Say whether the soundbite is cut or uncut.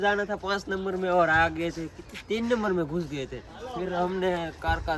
uncut